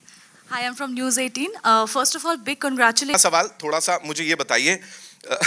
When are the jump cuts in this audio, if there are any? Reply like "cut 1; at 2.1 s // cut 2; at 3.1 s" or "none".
cut 1; at 3.1 s